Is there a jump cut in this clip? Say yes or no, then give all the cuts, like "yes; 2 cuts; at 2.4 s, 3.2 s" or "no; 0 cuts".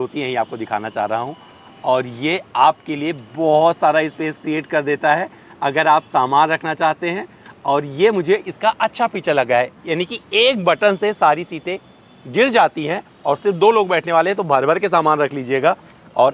no; 0 cuts